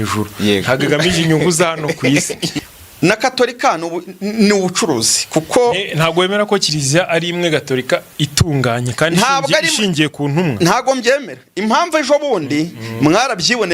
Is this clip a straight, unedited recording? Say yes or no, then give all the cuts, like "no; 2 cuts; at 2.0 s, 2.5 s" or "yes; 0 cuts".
no; 1 cut; at 2.5 s